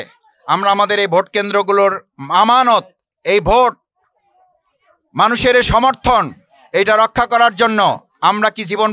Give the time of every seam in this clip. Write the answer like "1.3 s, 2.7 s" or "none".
none

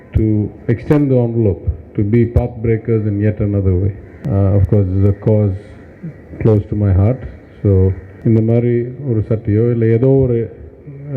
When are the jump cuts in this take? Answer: 4.1 s, 8.1 s

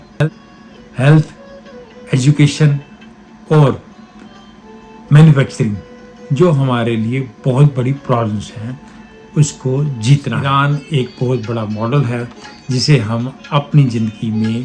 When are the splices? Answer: 10.5 s

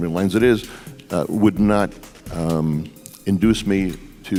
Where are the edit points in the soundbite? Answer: none

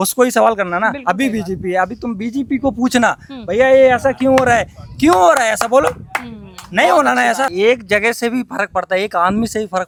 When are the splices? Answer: none

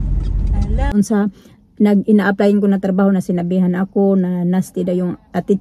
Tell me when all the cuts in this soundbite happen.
0.9 s

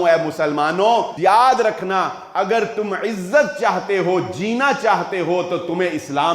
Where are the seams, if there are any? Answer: 1.1 s

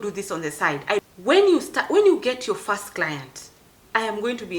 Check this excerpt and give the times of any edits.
1.0 s

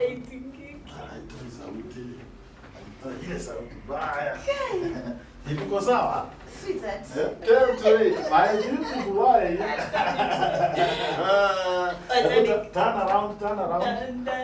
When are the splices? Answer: 7.4 s

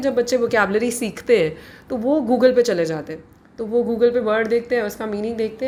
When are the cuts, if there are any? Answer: none

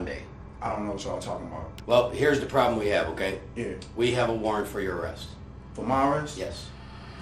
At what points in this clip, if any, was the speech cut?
1.7 s

